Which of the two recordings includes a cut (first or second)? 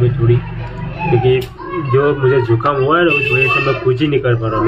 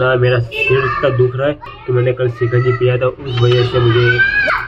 second